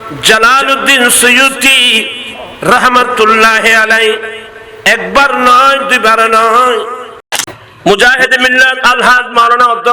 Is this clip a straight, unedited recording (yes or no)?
no